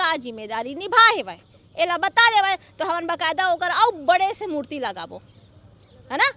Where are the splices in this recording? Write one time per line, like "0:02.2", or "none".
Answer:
none